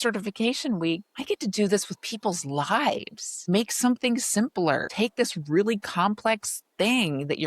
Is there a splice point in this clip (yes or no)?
yes